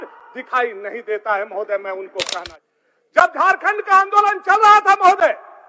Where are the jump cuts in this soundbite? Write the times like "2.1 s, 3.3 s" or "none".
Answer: 2.5 s